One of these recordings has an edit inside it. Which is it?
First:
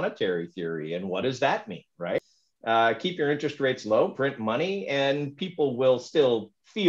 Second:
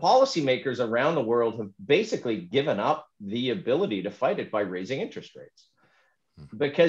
first; 1 cut; at 2.2 s

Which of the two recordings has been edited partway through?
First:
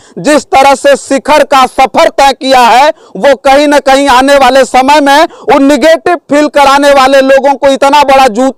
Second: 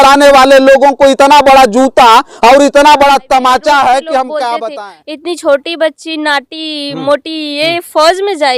second; 1 cut; at 4.6 s

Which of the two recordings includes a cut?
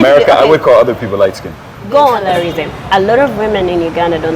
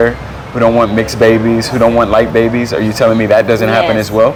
first; 1 cut; at 2.2 s

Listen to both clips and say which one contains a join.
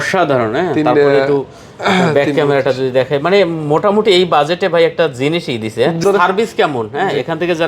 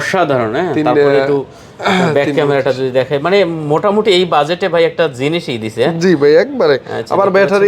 first; 1 cut; at 6.0 s

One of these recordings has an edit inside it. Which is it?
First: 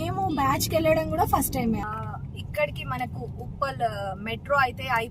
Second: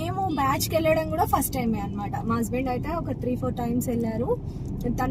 first; 1 cut; at 1.8 s

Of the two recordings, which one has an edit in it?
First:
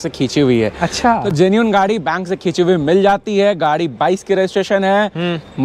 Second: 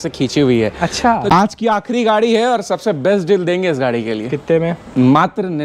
second; 1 cut; at 1.2 s

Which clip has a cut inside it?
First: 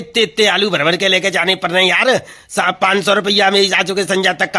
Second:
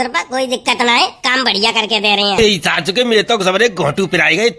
second; 1 cut; at 2.4 s

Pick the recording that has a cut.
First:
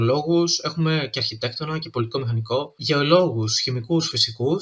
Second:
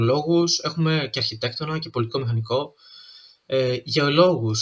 first; 1 cut; at 2.8 s

